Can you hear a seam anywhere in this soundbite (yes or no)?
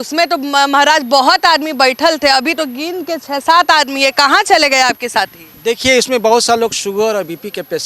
no